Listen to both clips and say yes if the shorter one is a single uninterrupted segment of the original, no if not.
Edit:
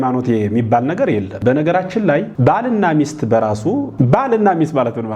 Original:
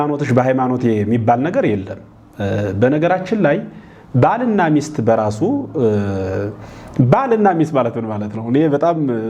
no